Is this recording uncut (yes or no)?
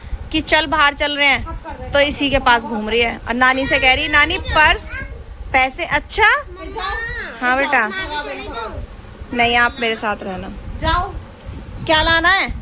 yes